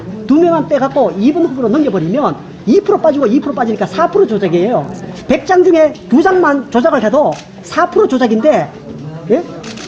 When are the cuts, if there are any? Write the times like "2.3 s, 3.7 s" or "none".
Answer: 6.4 s